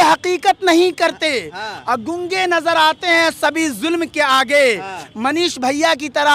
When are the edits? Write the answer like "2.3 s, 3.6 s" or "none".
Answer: none